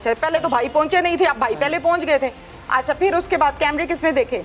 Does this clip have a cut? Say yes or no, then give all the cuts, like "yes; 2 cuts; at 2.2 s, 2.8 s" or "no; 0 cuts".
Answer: no; 0 cuts